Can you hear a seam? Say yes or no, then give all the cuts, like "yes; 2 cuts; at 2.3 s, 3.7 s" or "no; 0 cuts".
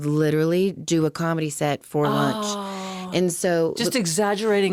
no; 0 cuts